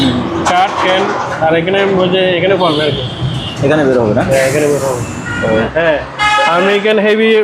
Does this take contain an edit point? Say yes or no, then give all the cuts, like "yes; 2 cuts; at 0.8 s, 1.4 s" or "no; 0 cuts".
yes; 1 cut; at 5.7 s